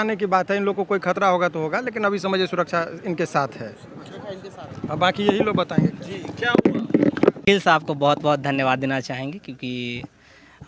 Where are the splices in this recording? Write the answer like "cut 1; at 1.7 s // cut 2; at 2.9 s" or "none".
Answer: cut 1; at 7.4 s